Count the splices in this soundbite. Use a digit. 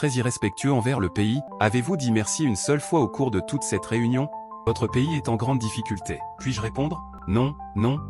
3